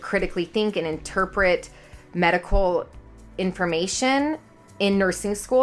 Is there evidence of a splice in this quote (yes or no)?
no